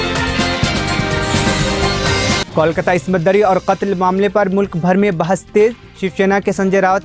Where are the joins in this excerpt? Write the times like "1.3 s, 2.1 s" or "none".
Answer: 2.4 s